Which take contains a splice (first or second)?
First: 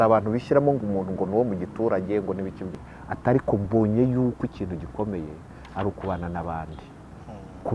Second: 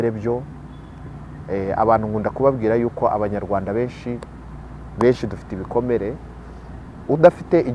first